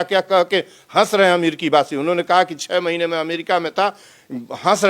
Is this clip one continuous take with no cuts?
yes; 0 cuts

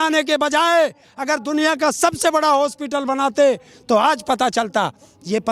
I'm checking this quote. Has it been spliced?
no; 0 cuts

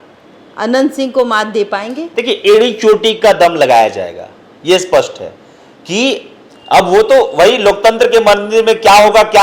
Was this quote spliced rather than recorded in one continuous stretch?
no; 0 cuts

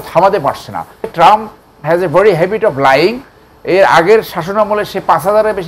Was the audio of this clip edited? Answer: yes; 1 cut; at 1.1 s

